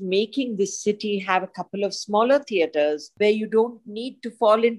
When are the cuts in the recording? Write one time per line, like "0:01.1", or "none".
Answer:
0:03.1